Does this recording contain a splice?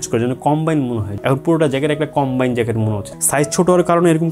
yes; 2 cuts; at 1.1 s, 3.1 s

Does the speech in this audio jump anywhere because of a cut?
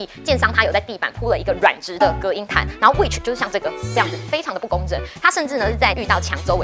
no; 0 cuts

